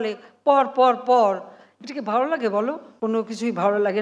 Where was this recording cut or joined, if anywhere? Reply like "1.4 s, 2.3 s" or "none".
2.9 s